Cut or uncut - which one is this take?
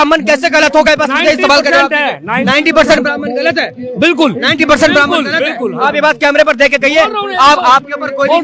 uncut